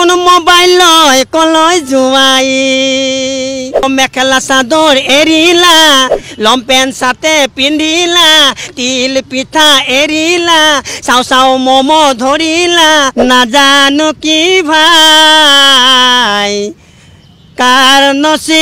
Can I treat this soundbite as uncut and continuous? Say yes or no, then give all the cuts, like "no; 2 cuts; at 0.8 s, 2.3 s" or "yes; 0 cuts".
no; 2 cuts; at 3.8 s, 13.1 s